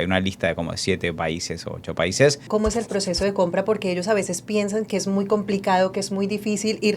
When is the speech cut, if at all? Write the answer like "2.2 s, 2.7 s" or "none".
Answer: 2.5 s